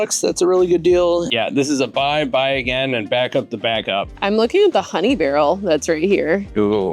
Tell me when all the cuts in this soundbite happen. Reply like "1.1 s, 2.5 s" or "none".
1.3 s, 4.1 s